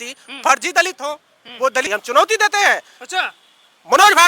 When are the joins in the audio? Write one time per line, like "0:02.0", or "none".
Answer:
0:01.9